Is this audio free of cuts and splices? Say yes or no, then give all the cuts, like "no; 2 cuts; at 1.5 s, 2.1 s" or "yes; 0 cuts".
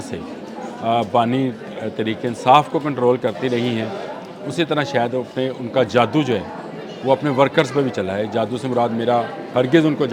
yes; 0 cuts